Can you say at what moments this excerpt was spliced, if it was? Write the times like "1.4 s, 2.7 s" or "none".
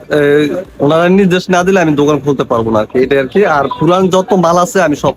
none